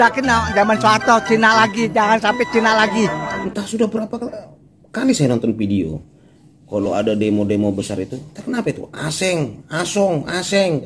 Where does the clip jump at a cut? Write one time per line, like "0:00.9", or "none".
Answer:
0:03.4